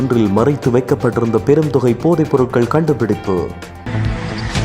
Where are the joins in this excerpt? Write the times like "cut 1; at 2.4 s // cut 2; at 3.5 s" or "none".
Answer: cut 1; at 3.7 s